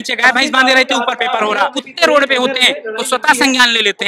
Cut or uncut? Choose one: cut